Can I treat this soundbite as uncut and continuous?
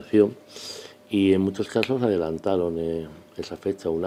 yes; 0 cuts

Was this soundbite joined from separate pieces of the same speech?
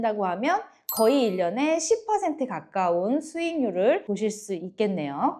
no; 0 cuts

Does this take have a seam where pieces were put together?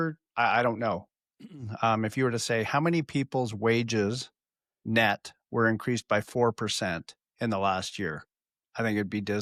no; 0 cuts

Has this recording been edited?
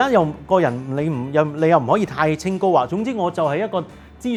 no; 0 cuts

